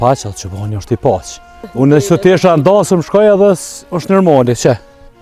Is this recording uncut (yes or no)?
no